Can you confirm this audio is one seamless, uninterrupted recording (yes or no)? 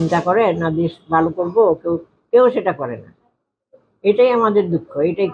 yes